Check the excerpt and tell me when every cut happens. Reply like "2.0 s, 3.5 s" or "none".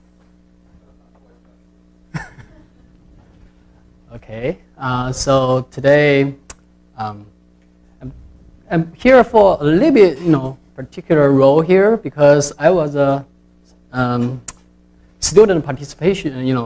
1.6 s

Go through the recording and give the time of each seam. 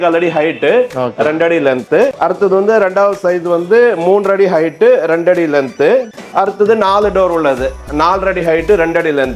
none

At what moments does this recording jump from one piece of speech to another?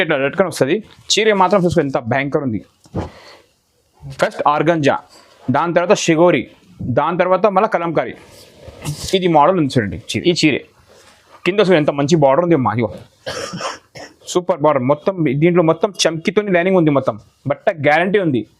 10.0 s

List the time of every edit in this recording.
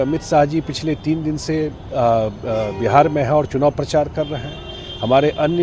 none

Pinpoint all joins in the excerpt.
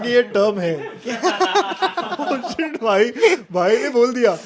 none

